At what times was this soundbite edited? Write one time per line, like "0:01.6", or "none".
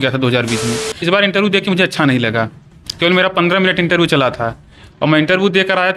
0:01.0